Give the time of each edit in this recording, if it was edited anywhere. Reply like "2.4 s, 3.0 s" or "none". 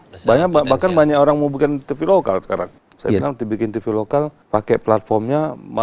2.8 s, 4.4 s